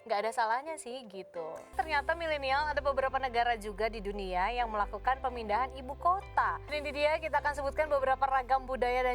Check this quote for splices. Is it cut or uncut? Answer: cut